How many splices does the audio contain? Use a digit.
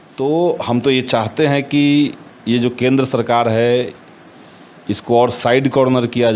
0